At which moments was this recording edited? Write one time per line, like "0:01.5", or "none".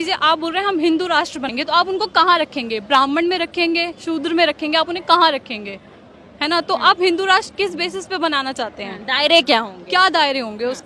0:01.5